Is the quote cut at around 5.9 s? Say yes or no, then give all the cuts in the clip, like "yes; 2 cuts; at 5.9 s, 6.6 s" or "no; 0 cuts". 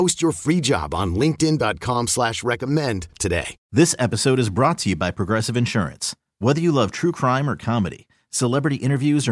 no; 1 cut; at 3.6 s